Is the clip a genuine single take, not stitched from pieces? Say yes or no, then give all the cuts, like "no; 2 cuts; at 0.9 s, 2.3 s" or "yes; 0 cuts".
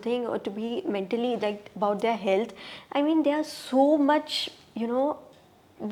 yes; 0 cuts